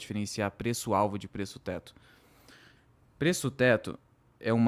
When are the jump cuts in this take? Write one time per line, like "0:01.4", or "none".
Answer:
none